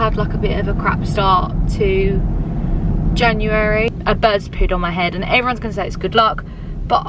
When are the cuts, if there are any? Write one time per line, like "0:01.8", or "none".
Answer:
0:03.9